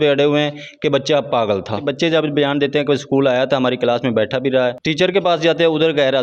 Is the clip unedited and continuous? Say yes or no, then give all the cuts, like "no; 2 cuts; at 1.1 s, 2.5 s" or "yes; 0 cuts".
no; 2 cuts; at 1.8 s, 4.8 s